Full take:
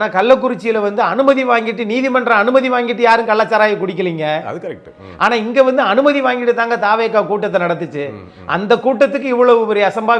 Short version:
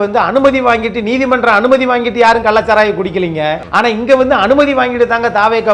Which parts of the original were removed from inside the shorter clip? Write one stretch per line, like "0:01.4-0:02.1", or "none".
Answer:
0:04.5-0:05.1